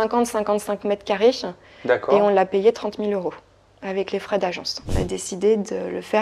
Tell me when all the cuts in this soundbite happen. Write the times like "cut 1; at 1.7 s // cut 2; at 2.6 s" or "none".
cut 1; at 4.8 s